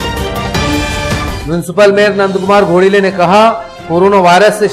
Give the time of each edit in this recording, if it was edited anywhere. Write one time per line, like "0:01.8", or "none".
0:01.2